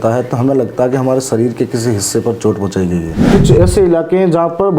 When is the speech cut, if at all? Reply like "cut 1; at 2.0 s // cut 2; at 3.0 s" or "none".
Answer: cut 1; at 3.2 s